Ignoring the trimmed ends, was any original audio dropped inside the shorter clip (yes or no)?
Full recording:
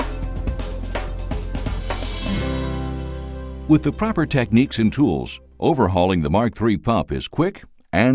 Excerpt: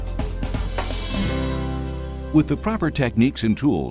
yes